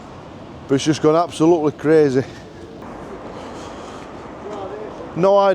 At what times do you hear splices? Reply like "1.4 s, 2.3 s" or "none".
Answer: 2.8 s